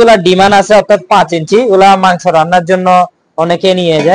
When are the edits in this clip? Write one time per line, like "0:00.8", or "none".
none